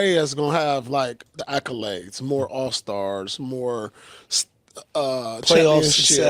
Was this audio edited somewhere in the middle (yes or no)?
yes